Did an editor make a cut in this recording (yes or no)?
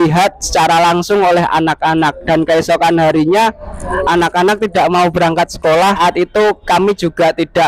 yes